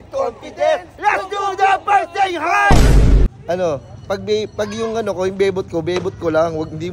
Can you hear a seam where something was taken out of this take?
yes; 1 cut; at 3.3 s

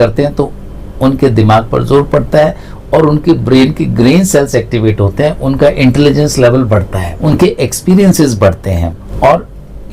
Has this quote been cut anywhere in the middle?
yes; 2 cuts; at 7.2 s, 9.0 s

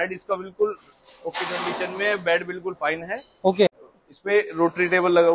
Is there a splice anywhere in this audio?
yes; 1 cut; at 3.8 s

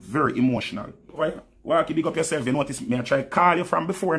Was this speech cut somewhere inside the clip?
yes; 1 cut; at 1.2 s

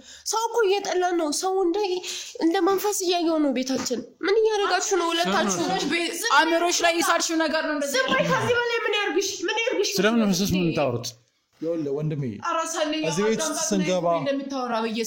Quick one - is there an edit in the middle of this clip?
no; 0 cuts

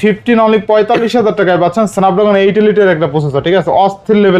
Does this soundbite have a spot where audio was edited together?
no; 0 cuts

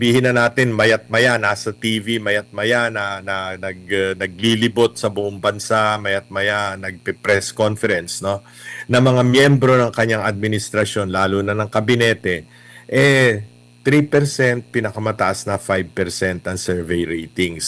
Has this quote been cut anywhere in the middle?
no; 0 cuts

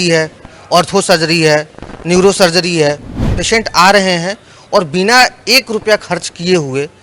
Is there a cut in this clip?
yes; 1 cut; at 3.3 s

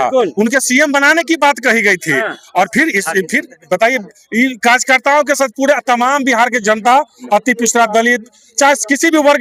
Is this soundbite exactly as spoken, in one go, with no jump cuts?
yes; 0 cuts

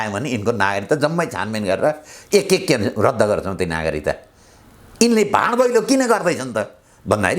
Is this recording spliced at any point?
no; 0 cuts

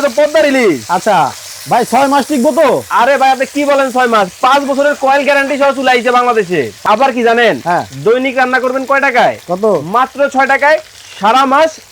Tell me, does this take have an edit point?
yes; 1 cut; at 6.8 s

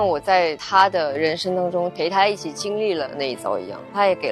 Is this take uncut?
yes; 0 cuts

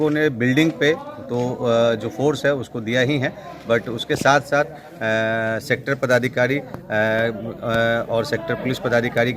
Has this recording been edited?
no; 0 cuts

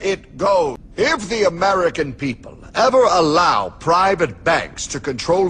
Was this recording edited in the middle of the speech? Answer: yes; 1 cut; at 1.6 s

